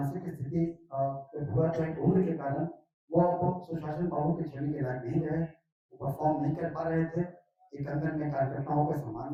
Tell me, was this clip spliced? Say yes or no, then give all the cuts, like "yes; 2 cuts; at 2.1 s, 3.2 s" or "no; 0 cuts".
no; 0 cuts